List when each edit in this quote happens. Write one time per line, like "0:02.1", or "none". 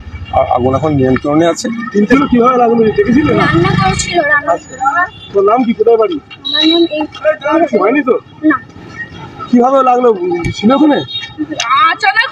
0:02.1